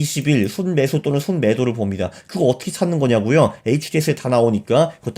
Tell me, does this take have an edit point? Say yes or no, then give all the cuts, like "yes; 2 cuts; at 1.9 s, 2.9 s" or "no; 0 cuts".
no; 0 cuts